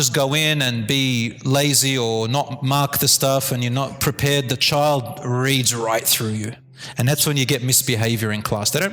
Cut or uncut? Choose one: uncut